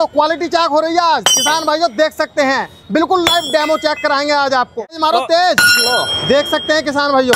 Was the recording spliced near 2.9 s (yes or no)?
no